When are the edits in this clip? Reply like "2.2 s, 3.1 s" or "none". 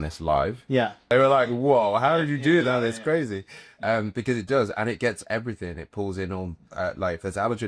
1.1 s